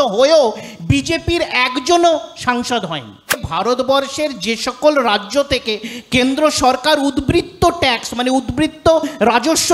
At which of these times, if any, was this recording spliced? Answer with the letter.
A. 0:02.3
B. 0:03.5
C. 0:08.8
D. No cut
B